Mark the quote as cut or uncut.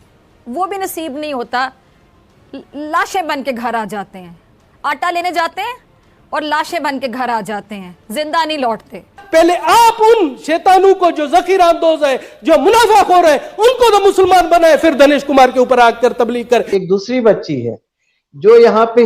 cut